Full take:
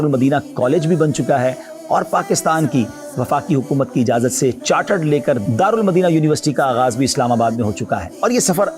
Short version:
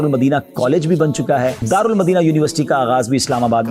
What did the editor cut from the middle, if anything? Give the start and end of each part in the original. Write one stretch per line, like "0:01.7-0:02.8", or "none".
0:01.6-0:05.5